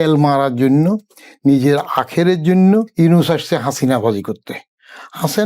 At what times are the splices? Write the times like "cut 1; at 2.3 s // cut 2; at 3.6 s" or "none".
cut 1; at 2.9 s